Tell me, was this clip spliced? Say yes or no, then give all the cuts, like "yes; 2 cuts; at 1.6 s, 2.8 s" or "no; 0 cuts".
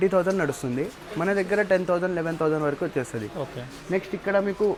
no; 0 cuts